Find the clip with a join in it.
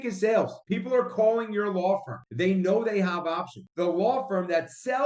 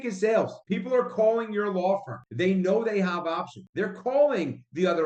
first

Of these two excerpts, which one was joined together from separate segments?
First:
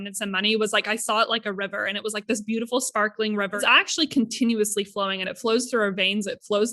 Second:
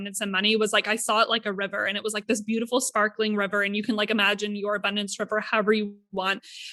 first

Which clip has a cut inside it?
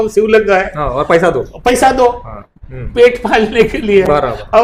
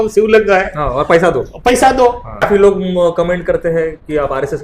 second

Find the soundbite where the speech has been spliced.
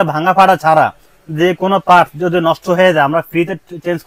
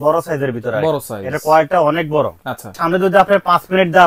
second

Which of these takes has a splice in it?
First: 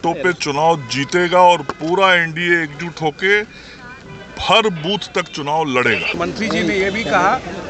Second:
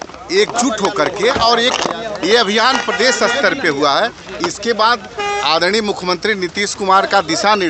first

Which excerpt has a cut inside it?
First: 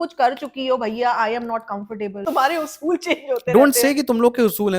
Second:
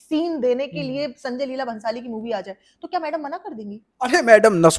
first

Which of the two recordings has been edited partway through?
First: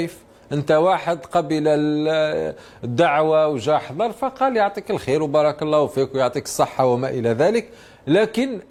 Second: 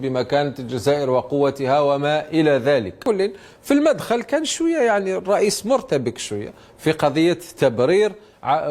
second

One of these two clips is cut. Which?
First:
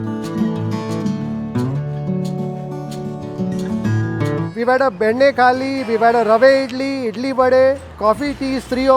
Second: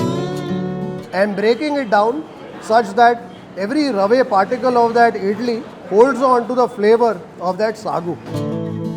first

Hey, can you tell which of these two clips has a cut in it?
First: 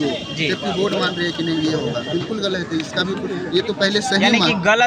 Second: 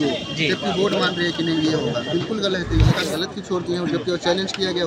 second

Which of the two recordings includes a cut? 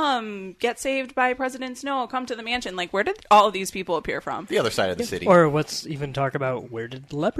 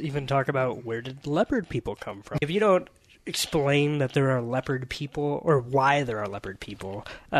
second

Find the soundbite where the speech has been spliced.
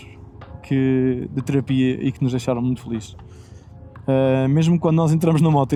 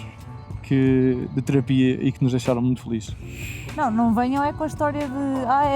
second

